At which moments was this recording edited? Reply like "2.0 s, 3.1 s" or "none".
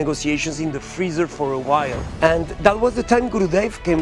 2.0 s